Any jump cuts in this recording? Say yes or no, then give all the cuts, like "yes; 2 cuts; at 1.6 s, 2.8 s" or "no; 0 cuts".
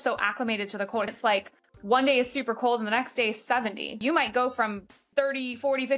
yes; 2 cuts; at 1.1 s, 4.0 s